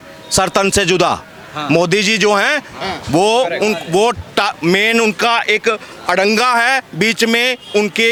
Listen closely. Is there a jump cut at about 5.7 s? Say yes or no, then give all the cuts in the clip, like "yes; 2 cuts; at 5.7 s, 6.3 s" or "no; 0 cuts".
no; 0 cuts